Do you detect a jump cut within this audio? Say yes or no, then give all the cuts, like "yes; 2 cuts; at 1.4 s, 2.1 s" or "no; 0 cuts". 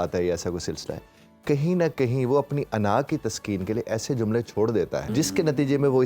yes; 1 cut; at 5.1 s